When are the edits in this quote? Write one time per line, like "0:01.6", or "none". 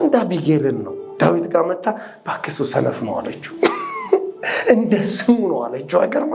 none